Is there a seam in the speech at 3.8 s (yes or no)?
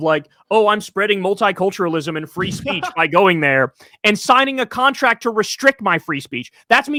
no